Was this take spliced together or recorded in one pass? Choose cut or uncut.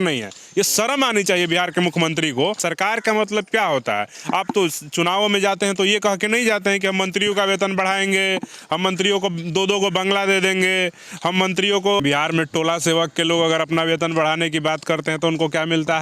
cut